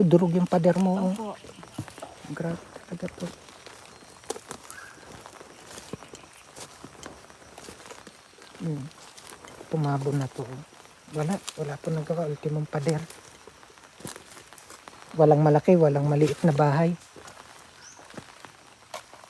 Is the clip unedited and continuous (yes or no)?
yes